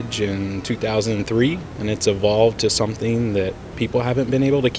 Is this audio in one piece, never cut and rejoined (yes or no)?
no